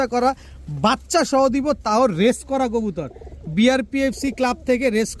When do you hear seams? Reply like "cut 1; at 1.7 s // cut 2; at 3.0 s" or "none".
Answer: none